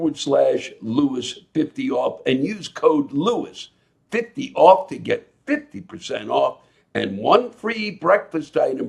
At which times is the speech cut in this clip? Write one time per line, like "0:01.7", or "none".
none